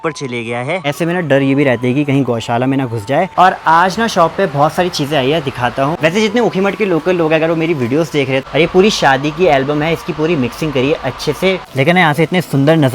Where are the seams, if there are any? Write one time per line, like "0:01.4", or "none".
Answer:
0:00.9
0:03.3
0:06.0
0:08.4
0:11.7